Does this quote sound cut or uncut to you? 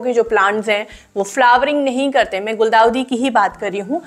uncut